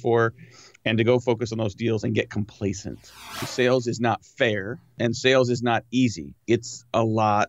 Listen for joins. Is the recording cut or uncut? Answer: cut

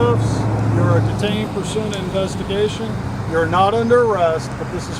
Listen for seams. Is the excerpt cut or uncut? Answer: uncut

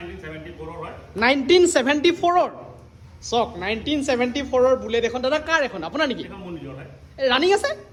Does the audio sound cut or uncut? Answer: uncut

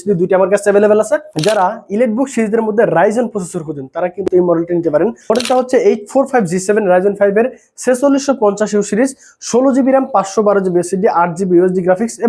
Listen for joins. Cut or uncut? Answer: cut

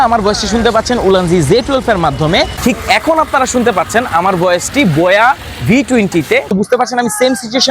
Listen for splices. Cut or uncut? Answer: cut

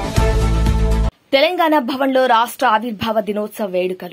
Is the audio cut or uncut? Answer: uncut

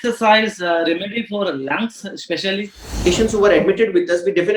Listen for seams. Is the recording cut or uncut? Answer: cut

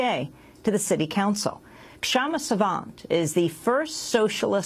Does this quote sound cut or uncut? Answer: uncut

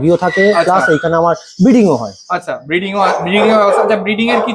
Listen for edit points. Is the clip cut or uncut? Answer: uncut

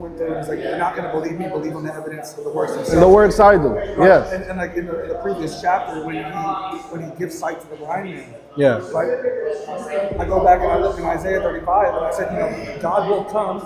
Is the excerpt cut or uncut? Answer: uncut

